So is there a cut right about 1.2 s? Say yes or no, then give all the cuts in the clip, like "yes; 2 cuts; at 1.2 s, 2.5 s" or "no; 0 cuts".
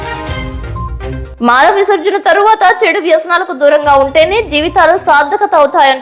yes; 1 cut; at 1.2 s